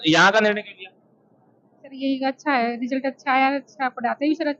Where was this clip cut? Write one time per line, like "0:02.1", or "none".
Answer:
none